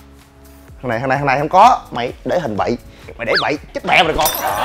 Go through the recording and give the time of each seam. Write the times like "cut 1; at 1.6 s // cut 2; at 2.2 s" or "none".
cut 1; at 3.1 s